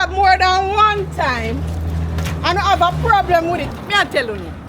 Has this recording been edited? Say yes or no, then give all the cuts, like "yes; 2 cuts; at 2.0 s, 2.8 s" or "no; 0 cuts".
yes; 1 cut; at 3.7 s